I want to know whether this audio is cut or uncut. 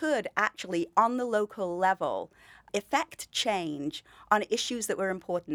cut